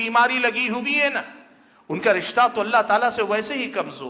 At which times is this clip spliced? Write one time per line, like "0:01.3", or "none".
none